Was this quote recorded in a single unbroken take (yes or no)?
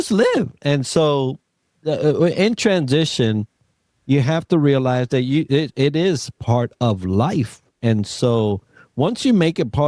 yes